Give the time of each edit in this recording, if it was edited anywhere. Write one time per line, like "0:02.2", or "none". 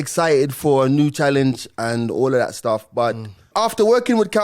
0:03.5